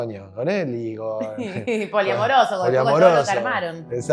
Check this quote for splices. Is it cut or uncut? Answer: uncut